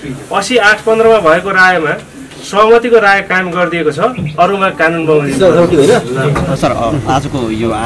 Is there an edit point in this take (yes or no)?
no